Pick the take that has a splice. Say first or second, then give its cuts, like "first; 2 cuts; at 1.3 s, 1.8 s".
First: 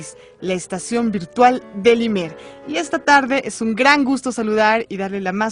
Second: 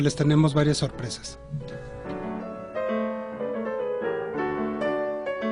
second; 1 cut; at 4.6 s